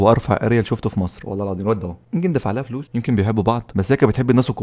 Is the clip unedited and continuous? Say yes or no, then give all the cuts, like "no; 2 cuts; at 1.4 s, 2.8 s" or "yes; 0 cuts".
no; 1 cut; at 2.0 s